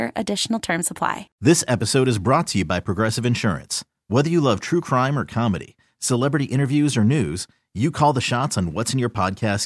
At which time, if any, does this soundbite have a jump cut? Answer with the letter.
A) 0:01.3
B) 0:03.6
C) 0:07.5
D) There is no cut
A